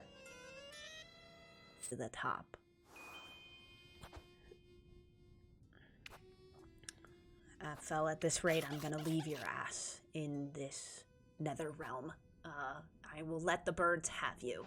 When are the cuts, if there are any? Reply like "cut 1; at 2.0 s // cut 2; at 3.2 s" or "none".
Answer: cut 1; at 1.9 s